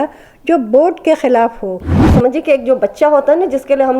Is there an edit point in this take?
yes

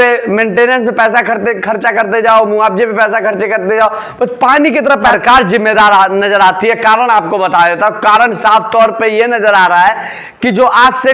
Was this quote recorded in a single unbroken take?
no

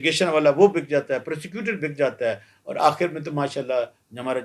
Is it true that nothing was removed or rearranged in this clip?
yes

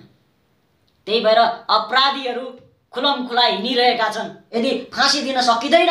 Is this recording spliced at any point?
yes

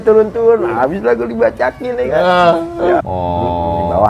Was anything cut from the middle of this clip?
yes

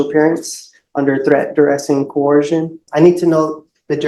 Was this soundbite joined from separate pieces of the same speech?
yes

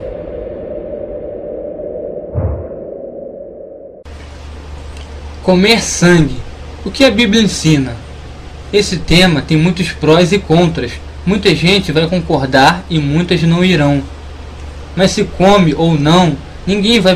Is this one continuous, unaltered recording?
no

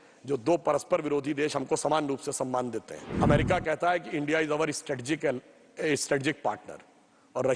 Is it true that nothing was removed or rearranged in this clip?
no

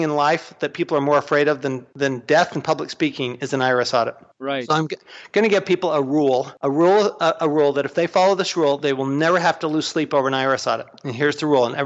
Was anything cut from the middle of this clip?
no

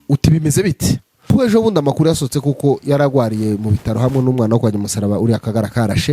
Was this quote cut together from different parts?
yes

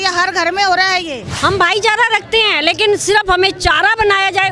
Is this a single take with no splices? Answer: no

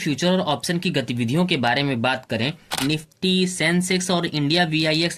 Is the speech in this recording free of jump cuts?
no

